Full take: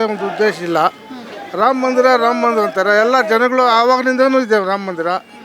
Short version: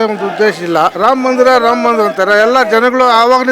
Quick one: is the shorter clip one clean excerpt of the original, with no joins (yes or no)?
no